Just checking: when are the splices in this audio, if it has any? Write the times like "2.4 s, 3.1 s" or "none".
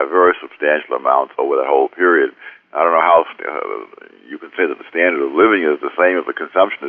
5.3 s